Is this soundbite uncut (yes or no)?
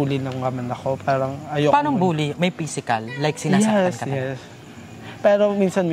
yes